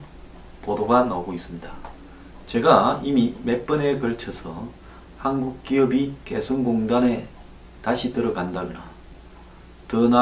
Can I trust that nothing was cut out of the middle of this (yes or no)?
no